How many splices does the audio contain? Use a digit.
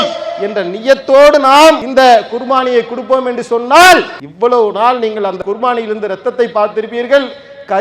3